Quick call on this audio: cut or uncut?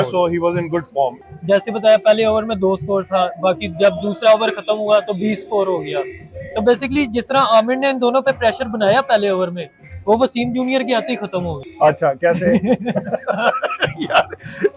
cut